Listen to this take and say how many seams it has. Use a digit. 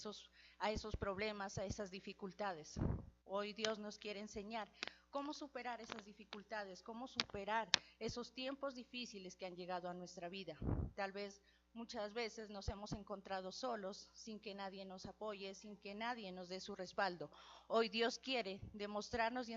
1